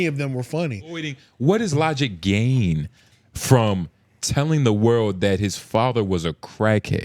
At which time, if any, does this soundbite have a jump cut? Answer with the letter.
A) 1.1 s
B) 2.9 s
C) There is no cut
A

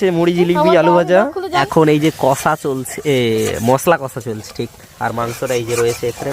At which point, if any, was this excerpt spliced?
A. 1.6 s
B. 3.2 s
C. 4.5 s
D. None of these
A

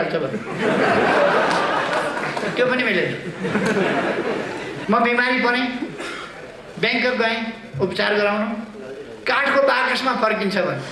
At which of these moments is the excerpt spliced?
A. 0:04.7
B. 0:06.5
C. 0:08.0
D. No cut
A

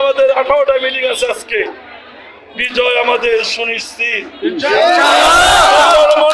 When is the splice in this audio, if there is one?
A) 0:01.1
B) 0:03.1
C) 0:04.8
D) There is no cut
D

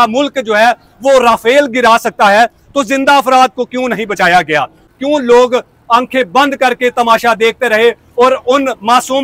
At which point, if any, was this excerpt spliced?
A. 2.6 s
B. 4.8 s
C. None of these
B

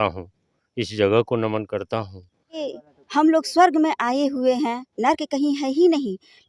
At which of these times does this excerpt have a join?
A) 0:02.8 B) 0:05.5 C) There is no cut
A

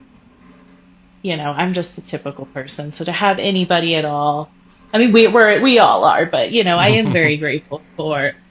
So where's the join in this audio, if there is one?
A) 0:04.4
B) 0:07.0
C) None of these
C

